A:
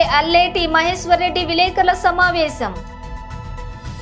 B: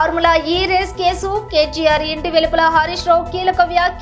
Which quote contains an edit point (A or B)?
A